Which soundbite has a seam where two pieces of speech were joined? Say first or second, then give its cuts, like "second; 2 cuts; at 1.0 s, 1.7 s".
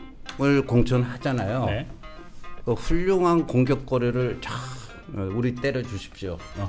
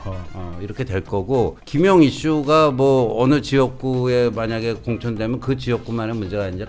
second; 1 cut; at 1.6 s